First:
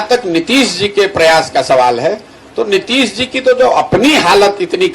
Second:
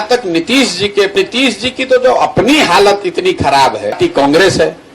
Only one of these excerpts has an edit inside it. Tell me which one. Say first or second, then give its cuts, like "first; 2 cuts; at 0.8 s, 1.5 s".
second; 2 cuts; at 1.1 s, 4.0 s